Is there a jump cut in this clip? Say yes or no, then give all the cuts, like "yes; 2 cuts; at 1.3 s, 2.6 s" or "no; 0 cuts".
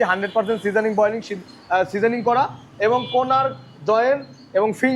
no; 0 cuts